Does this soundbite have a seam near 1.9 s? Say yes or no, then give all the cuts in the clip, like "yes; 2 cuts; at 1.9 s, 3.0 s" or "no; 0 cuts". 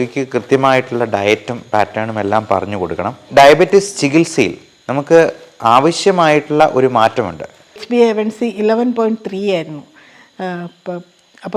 no; 2 cuts; at 3.2 s, 7.8 s